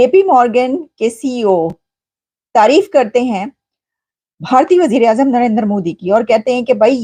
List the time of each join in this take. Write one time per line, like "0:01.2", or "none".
none